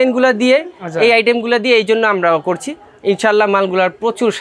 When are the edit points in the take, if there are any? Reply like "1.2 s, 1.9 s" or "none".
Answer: none